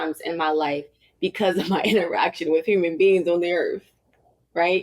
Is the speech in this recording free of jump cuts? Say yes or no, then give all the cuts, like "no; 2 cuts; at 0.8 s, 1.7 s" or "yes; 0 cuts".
yes; 0 cuts